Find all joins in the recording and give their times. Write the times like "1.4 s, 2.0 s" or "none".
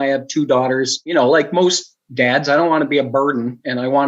1.0 s